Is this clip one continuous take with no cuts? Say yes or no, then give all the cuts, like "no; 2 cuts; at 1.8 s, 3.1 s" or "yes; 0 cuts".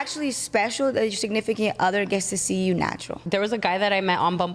no; 1 cut; at 3.2 s